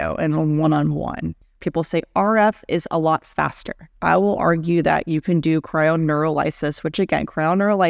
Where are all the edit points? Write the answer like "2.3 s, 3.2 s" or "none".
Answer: 1.5 s, 3.9 s